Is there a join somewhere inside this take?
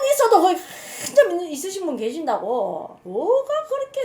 yes; 1 cut; at 2.9 s

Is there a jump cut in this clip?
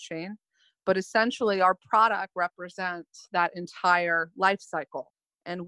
no; 0 cuts

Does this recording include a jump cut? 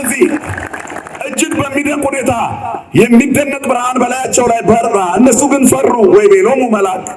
no; 0 cuts

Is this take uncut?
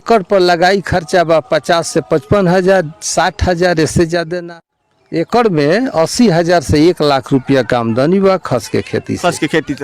no; 1 cut; at 4.3 s

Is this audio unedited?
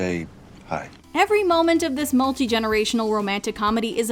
yes; 0 cuts

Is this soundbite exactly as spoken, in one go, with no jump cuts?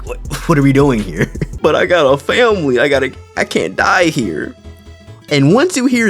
no; 1 cut; at 1.4 s

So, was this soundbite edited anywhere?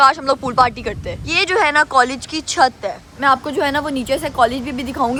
no; 0 cuts

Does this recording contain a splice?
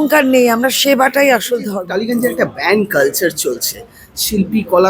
yes; 1 cut; at 1.8 s

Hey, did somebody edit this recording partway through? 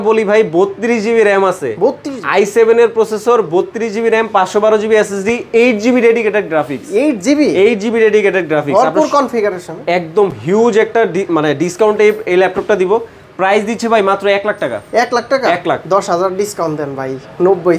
no; 0 cuts

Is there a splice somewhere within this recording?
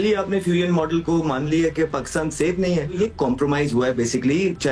yes; 1 cut; at 2.9 s

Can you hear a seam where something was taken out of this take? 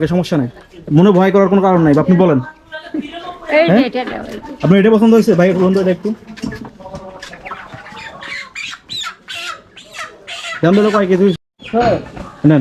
yes; 1 cut; at 11.5 s

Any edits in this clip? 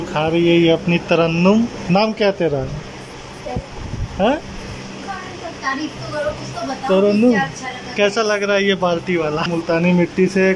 yes; 1 cut; at 9.5 s

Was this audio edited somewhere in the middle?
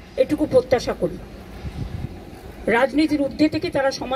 no; 0 cuts

